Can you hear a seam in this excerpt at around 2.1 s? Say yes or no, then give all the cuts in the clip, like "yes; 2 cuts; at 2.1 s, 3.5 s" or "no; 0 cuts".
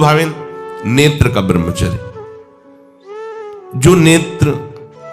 no; 0 cuts